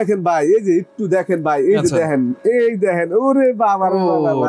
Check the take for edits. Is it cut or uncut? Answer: uncut